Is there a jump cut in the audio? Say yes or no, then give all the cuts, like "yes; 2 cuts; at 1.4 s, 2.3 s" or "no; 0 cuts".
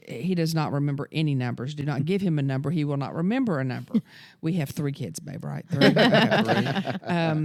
no; 0 cuts